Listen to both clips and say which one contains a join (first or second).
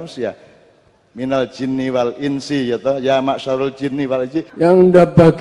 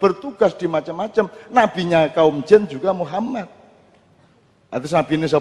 first